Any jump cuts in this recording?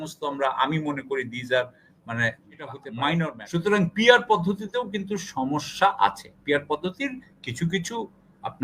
yes; 1 cut; at 3.4 s

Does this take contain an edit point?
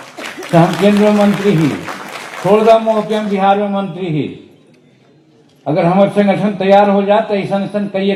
no; 0 cuts

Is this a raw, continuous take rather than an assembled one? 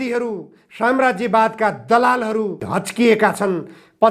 no; 1 cut; at 2.6 s

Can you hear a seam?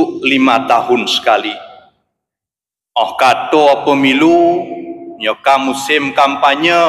no; 0 cuts

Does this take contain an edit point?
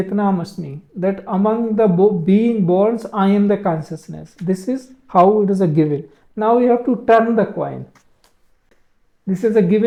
no; 0 cuts

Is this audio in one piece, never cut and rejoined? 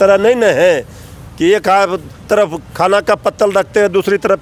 yes; 0 cuts

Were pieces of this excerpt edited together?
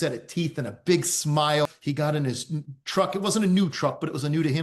yes; 1 cut; at 1.7 s

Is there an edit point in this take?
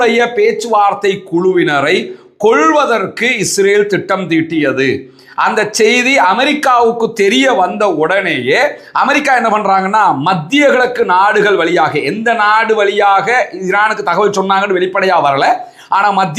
no; 0 cuts

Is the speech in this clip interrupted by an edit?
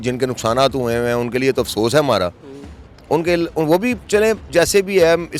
no; 0 cuts

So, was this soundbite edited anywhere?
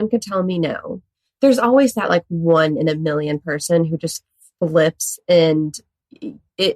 yes; 1 cut; at 1.2 s

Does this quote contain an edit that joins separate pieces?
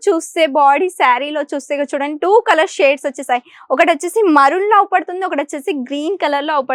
no; 0 cuts

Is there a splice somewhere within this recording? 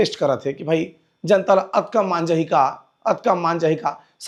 no; 0 cuts

